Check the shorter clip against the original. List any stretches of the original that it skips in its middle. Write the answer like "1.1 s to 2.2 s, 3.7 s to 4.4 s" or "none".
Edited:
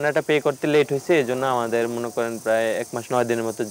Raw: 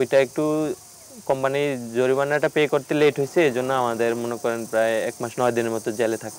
none